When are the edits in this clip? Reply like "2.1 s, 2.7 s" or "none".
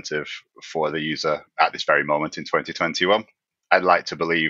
1.5 s, 3.5 s